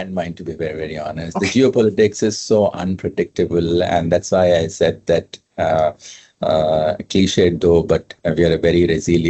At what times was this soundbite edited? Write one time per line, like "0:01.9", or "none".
none